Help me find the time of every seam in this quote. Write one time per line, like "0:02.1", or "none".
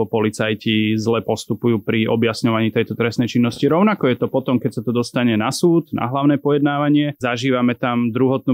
0:07.2